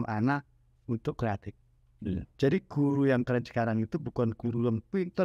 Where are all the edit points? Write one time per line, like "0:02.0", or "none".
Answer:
none